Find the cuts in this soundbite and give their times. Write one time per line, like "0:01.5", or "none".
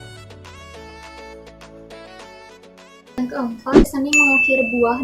0:03.9

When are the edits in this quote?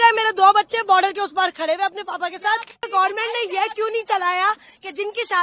0:02.9

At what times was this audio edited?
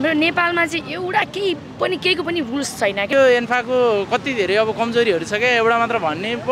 0:03.1

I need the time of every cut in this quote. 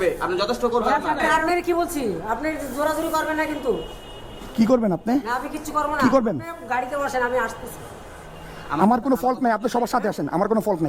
0:01.4

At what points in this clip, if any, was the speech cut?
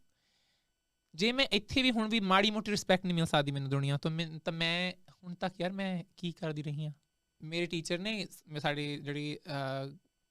0:07.4

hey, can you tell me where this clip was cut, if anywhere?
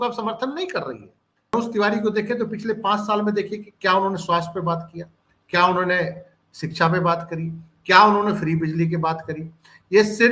0:01.5

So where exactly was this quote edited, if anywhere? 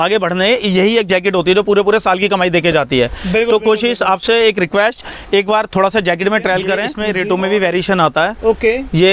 0:06.9

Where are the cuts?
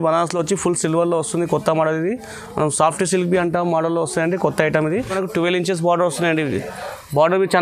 0:05.2

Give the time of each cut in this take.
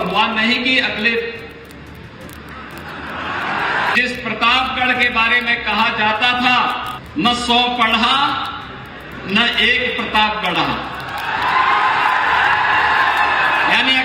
0:03.9
0:06.9

